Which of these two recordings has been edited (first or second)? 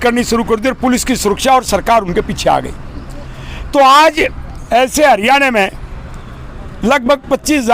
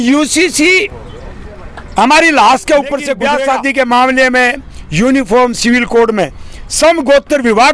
second